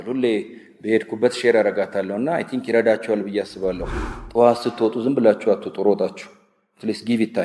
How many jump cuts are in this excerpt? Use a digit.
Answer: 1